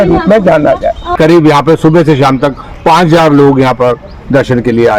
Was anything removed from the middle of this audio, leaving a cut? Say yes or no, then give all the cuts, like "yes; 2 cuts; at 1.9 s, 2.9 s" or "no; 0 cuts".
yes; 1 cut; at 1.1 s